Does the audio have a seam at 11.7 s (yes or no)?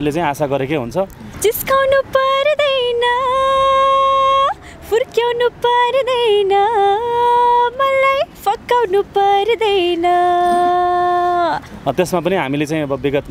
yes